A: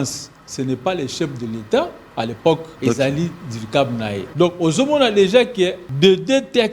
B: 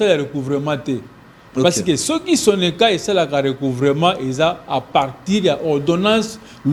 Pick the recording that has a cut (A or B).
A